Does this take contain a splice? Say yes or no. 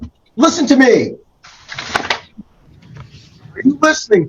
no